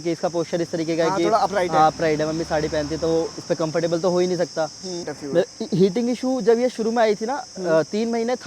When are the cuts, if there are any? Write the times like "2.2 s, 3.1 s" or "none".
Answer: 5.1 s